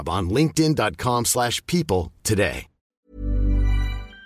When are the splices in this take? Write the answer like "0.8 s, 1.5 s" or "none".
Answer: 3.0 s